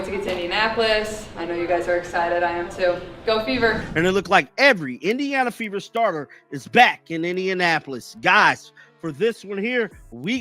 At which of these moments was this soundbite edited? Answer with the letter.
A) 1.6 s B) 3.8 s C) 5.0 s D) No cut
B